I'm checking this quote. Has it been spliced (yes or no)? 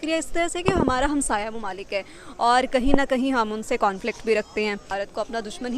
yes